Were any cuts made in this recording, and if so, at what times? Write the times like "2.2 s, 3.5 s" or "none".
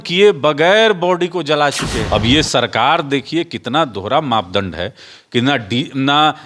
2.0 s